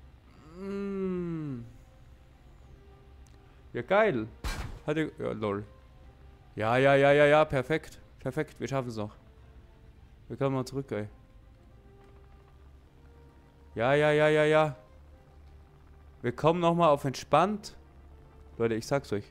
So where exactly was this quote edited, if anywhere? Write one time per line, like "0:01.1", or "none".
none